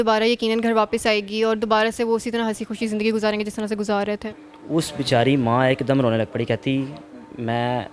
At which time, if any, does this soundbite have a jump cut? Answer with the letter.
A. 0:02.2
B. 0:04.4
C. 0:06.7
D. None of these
B